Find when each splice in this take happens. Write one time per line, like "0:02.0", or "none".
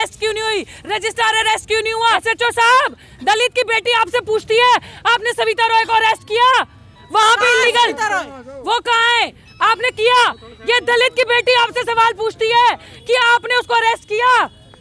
0:02.2